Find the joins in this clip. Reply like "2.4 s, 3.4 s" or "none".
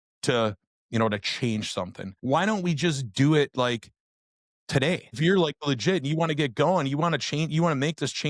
2.0 s, 5.2 s